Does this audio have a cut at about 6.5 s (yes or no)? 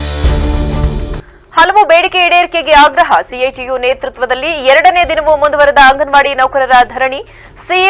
no